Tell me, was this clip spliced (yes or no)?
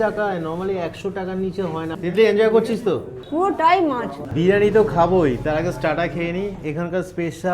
yes